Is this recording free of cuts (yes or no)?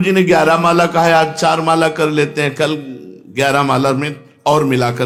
yes